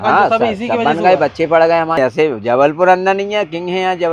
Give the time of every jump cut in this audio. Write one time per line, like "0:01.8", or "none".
0:02.0